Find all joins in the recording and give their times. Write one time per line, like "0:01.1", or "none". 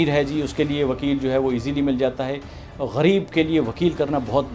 none